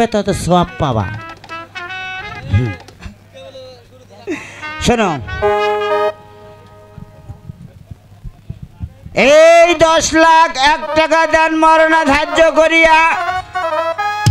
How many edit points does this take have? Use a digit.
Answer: 0